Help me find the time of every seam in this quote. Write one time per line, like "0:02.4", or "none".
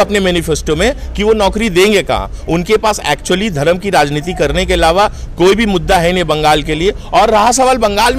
none